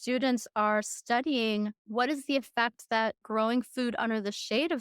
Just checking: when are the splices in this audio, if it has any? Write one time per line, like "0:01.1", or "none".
0:01.8
0:03.2